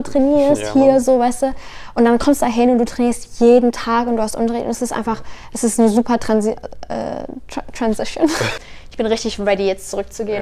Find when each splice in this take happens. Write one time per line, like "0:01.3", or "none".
0:08.5

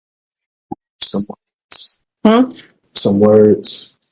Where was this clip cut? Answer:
none

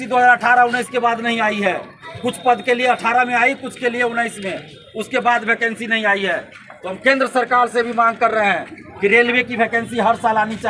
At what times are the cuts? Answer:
none

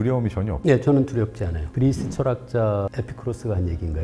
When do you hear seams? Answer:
none

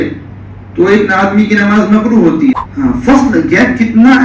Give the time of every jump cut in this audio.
0:02.6

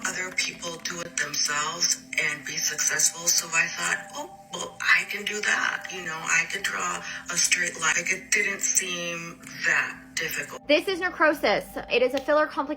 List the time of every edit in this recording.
0:07.9
0:10.5
0:11.9

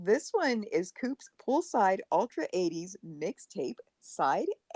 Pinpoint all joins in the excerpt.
none

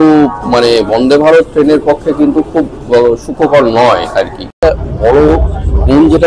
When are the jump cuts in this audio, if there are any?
0:04.6

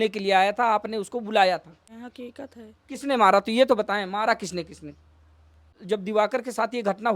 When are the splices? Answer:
0:01.8
0:05.7

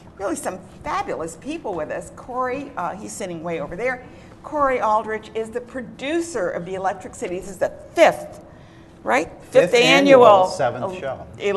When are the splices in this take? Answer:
0:10.4

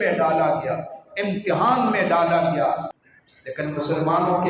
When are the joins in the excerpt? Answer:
0:02.9

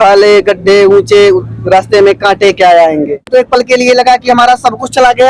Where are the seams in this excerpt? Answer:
0:03.3

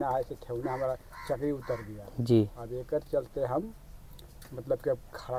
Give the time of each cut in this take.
none

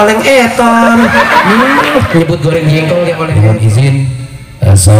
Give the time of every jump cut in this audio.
0:03.3

